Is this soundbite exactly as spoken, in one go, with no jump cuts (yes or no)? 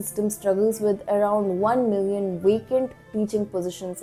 yes